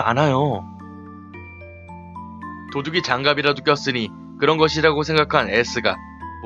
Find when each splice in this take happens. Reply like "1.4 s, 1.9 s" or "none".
none